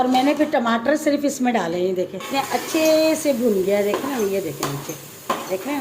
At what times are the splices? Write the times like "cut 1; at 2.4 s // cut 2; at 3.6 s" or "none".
cut 1; at 2.2 s

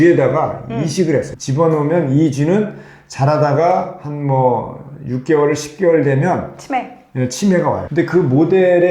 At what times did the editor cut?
cut 1; at 1.4 s // cut 2; at 7.9 s

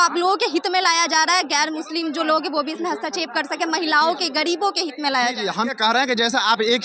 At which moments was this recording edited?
cut 1; at 5.7 s

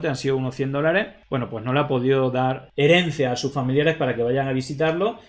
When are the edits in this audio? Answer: cut 1; at 1.2 s // cut 2; at 2.6 s

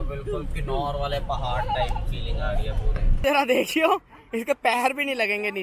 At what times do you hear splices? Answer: cut 1; at 3.2 s

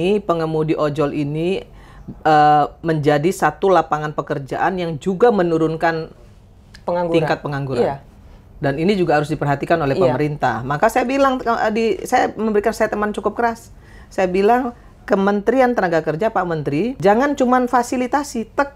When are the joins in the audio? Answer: cut 1; at 17.0 s

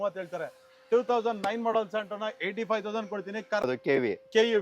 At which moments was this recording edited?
cut 1; at 3.7 s

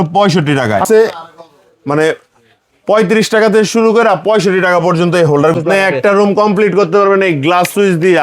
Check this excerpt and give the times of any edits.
cut 1; at 0.8 s // cut 2; at 5.5 s

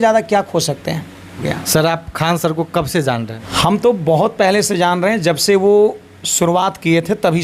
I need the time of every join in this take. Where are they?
cut 1; at 1.5 s // cut 2; at 3.4 s

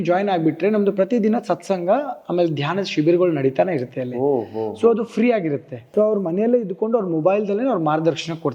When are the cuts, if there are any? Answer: cut 1; at 5.8 s

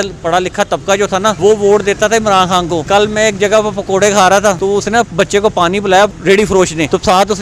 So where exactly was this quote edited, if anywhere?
cut 1; at 1.4 s // cut 2; at 2.8 s // cut 3; at 4.6 s // cut 4; at 6.4 s

